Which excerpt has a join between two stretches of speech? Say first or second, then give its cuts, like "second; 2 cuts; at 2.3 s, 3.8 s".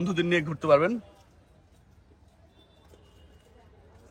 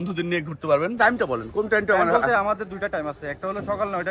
second; 1 cut; at 1.1 s